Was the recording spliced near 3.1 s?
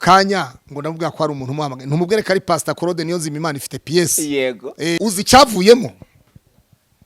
no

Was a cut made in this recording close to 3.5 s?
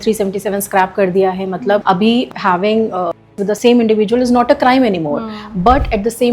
yes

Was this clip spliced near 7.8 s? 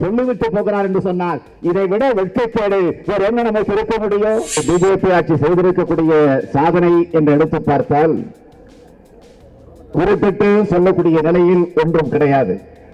no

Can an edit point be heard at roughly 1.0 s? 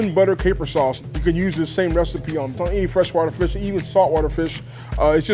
yes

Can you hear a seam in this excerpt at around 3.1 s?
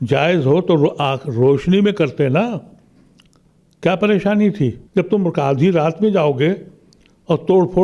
no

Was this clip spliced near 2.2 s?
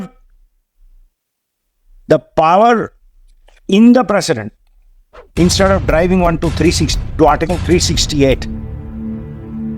no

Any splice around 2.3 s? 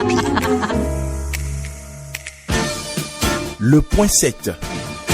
yes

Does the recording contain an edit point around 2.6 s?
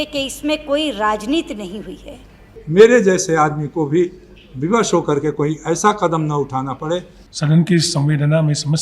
yes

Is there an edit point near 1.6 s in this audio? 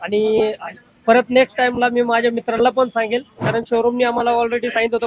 no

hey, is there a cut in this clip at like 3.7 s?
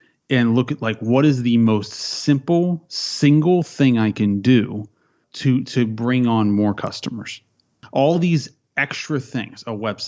no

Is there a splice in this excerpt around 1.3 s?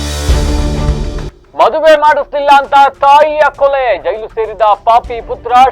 yes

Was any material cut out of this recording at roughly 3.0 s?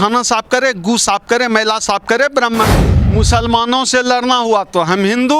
yes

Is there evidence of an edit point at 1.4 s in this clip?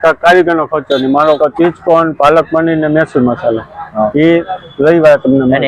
yes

